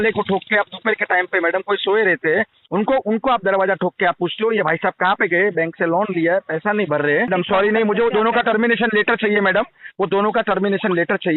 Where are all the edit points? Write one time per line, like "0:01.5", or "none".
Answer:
0:07.3